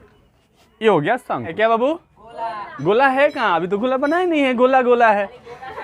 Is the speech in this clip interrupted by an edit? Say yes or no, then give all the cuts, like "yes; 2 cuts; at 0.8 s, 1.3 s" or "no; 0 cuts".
yes; 1 cut; at 1.5 s